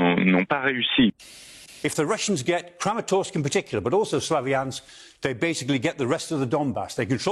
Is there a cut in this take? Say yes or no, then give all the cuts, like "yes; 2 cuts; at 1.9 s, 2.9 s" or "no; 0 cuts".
yes; 1 cut; at 1.3 s